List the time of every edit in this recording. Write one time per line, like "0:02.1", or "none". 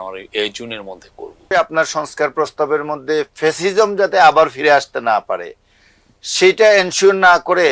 0:01.5